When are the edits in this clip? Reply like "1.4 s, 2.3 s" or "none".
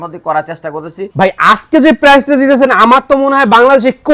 1.0 s

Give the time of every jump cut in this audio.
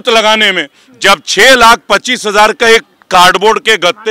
none

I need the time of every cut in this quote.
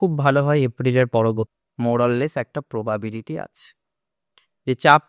1.6 s

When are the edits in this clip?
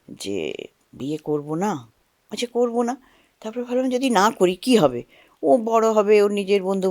none

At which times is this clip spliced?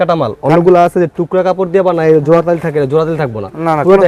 none

